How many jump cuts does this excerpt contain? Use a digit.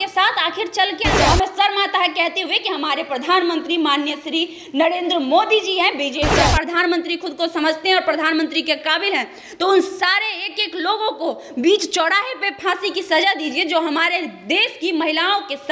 2